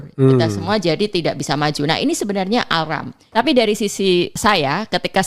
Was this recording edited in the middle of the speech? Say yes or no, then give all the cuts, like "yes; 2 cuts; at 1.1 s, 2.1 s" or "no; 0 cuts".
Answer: yes; 2 cuts; at 3.2 s, 4.4 s